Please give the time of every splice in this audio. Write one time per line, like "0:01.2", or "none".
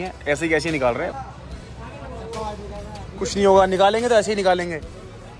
0:01.1

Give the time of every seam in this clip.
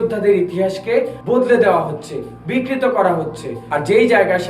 0:01.2
0:03.5

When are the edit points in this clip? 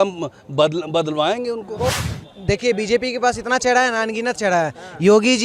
0:02.1

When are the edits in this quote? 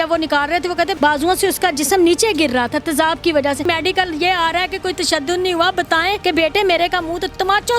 0:00.9
0:03.6
0:06.2

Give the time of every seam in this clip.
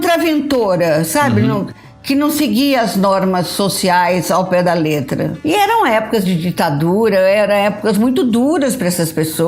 0:05.3

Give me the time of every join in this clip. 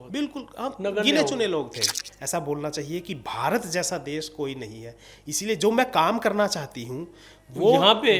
0:02.1

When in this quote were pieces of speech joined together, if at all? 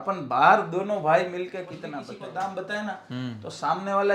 0:02.0

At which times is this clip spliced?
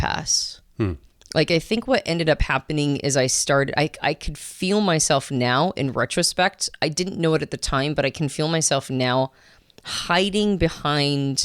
none

